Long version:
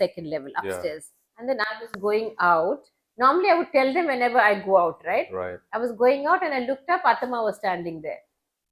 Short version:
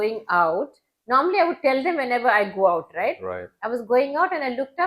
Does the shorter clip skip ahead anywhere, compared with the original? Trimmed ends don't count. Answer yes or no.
no